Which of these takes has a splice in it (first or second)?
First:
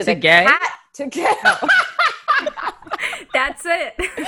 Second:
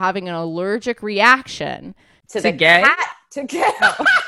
first